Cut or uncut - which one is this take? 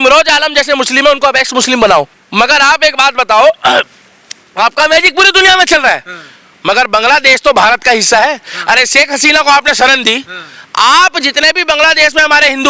cut